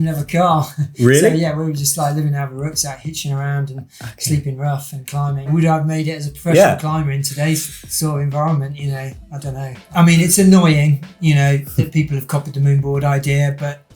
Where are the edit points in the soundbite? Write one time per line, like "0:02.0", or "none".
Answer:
0:05.5
0:09.8